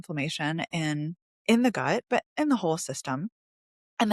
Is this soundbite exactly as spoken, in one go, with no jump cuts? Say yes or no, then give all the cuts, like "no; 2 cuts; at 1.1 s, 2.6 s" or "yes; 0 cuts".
yes; 0 cuts